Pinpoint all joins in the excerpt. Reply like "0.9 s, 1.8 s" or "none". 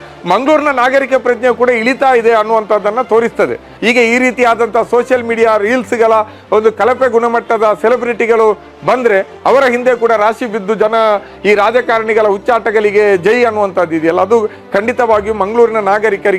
3.7 s